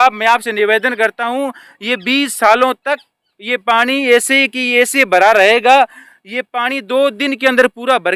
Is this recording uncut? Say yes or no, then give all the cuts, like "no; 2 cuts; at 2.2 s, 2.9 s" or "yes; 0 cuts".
yes; 0 cuts